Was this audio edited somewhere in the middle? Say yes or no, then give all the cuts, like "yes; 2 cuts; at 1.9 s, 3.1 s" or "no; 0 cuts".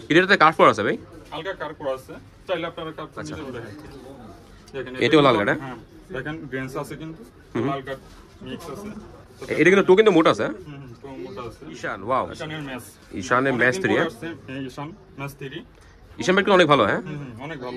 yes; 2 cuts; at 3.4 s, 11.8 s